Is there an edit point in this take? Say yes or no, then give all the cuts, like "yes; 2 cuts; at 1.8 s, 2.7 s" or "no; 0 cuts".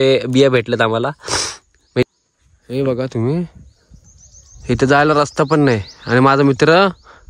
yes; 1 cut; at 2.0 s